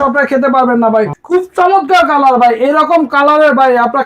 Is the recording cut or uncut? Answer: cut